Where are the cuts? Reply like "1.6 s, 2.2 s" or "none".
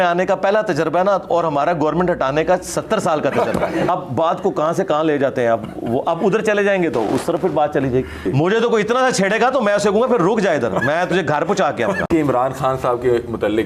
3.9 s, 8.3 s, 12.1 s